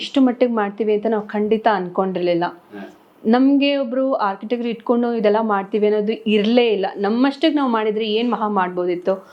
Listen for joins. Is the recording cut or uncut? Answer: uncut